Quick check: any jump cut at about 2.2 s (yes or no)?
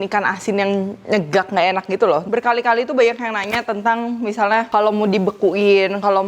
yes